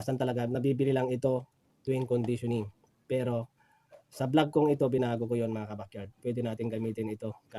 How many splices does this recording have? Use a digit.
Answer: 0